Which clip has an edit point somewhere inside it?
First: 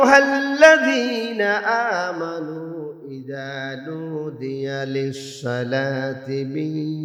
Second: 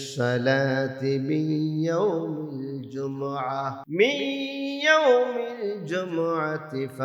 second; 1 cut; at 3.8 s

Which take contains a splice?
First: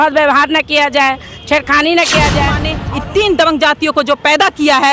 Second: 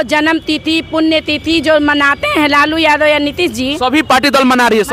first; 1 cut; at 2.7 s

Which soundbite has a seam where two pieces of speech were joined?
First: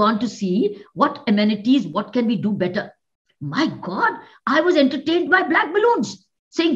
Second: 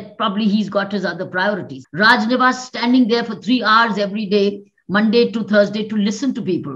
second; 1 cut; at 1.8 s

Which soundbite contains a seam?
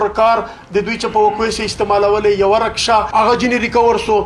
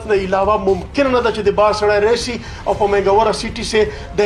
first; 1 cut; at 3.1 s

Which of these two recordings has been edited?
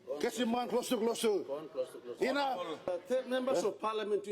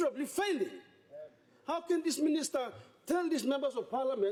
first; 1 cut; at 2.8 s

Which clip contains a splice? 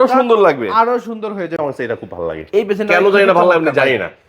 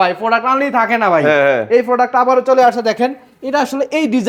first; 1 cut; at 1.5 s

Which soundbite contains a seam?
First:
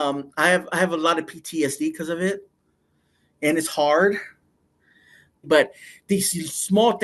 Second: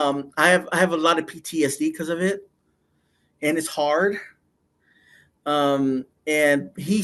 first; 1 cut; at 5.4 s

